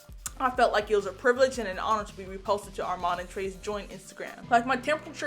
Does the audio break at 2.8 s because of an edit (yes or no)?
no